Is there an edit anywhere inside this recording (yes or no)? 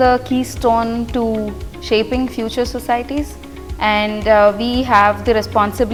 no